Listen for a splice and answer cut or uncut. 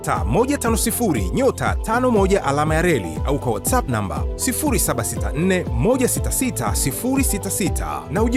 uncut